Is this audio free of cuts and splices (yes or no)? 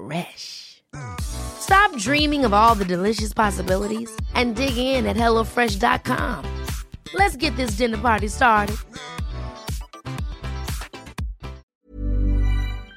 no